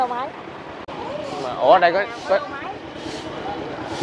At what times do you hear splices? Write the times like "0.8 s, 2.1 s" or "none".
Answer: 0.9 s